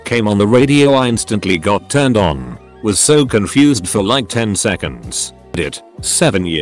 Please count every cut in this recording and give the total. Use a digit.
1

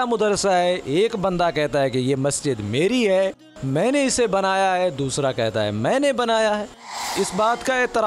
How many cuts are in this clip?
1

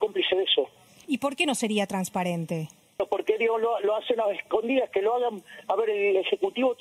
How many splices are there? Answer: 2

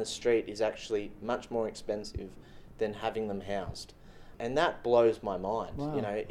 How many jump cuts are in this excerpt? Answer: 1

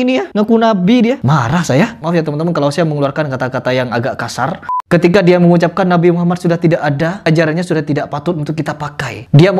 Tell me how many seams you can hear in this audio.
3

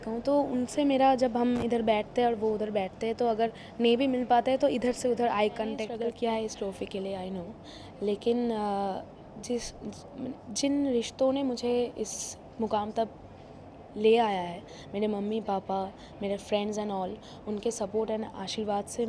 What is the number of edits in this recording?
1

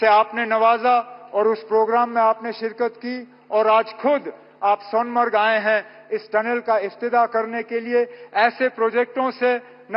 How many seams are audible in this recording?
0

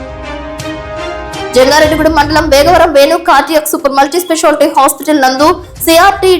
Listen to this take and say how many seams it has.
1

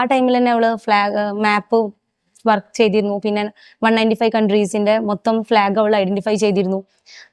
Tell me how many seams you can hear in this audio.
0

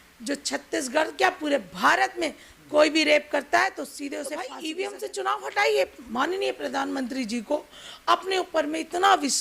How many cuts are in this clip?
1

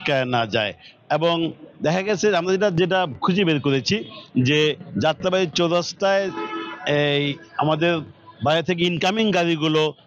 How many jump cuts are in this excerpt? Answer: 0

